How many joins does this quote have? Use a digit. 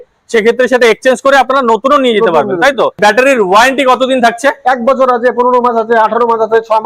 1